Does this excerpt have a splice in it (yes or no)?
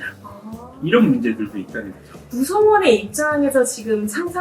yes